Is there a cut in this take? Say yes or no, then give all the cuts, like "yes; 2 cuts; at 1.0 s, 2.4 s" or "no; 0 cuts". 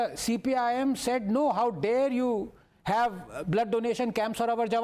no; 0 cuts